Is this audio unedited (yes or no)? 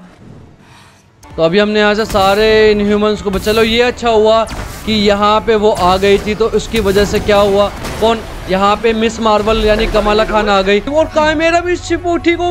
no